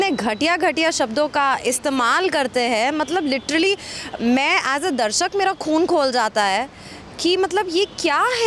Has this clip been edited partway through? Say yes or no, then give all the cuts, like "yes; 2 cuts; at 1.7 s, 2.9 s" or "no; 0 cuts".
no; 0 cuts